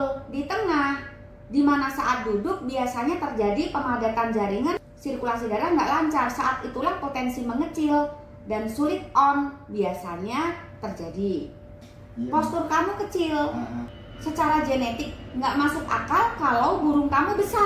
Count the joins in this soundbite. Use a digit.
2